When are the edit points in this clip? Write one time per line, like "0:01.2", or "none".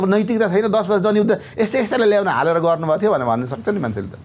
none